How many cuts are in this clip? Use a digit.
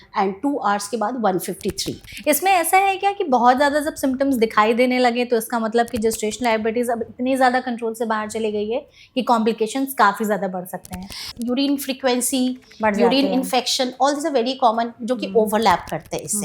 2